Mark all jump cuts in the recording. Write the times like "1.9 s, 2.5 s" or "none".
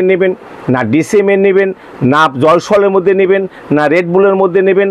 none